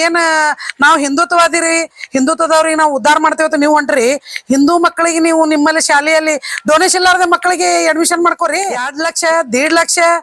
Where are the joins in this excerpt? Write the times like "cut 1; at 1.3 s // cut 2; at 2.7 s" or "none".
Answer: cut 1; at 9.0 s